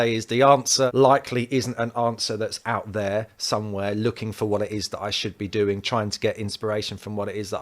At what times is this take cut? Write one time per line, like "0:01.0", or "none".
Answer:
0:00.9